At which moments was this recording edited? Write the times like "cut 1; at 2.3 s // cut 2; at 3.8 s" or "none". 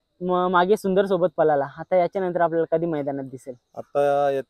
none